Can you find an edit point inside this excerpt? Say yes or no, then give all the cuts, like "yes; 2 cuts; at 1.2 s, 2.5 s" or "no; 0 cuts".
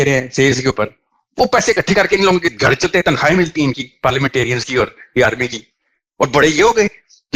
no; 0 cuts